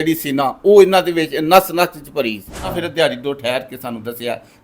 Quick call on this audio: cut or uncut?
cut